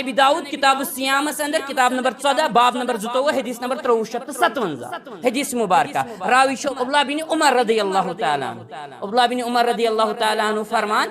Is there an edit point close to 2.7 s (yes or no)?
no